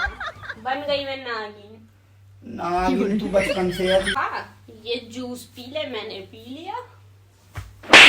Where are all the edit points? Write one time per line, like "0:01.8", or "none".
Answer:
0:04.1